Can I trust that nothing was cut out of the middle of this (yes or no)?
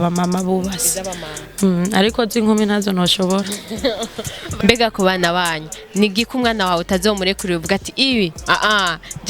no